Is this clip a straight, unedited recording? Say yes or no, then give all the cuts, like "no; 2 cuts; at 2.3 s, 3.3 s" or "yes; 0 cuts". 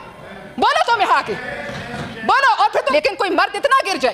no; 1 cut; at 2.9 s